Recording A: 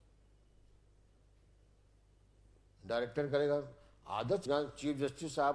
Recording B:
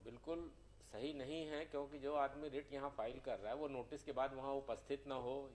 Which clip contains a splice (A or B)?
A